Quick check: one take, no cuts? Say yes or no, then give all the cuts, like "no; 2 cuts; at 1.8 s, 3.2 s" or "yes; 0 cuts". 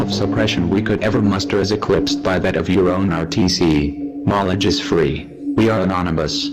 yes; 0 cuts